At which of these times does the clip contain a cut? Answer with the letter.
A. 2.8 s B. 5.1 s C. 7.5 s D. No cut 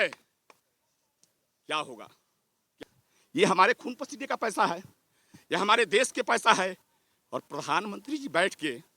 A